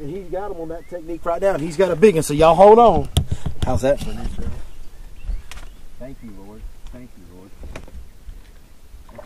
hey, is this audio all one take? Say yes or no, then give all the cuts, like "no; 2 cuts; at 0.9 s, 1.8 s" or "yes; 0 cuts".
no; 1 cut; at 7.9 s